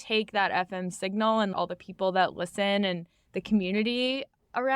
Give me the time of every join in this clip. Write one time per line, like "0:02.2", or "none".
0:01.5